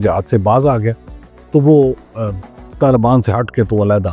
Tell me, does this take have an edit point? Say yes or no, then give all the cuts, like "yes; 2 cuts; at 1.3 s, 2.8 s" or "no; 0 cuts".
no; 0 cuts